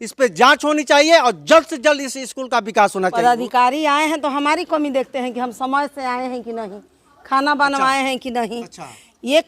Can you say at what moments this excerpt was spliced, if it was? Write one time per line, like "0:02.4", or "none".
0:03.2